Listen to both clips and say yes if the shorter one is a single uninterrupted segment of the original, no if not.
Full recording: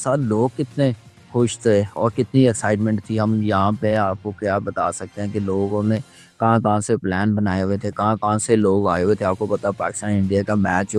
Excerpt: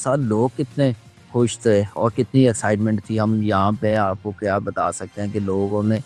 yes